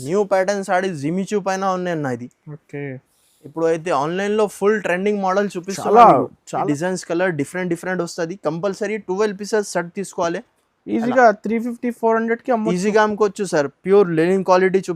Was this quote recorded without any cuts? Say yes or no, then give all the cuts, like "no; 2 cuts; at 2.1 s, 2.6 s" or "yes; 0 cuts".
no; 1 cut; at 6.6 s